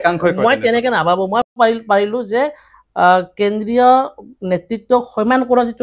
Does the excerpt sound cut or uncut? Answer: cut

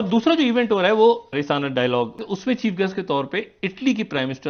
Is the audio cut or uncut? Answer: cut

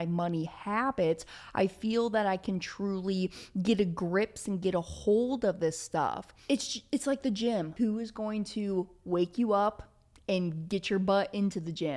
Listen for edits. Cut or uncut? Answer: cut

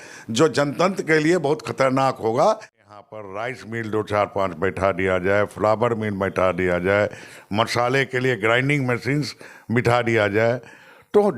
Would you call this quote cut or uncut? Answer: cut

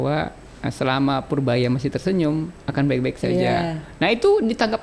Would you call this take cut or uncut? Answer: uncut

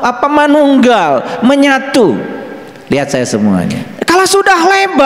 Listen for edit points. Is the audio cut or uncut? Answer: cut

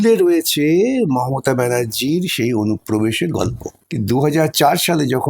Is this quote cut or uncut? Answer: cut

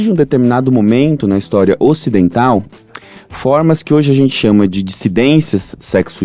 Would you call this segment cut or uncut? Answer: uncut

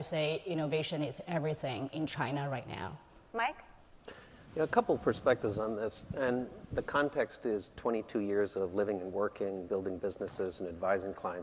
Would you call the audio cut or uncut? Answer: uncut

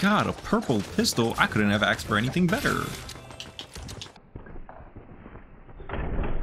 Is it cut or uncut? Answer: uncut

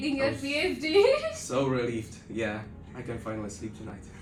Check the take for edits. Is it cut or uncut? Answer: uncut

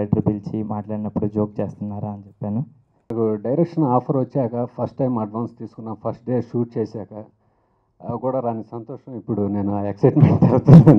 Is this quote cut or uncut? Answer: cut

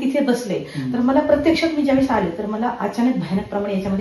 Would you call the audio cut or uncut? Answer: uncut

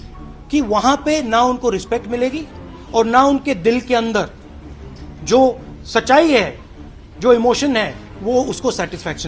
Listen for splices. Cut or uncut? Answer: uncut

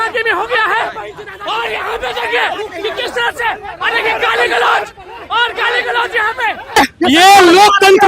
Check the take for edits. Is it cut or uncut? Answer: cut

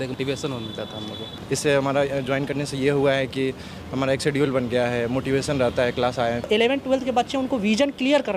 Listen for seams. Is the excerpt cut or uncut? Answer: cut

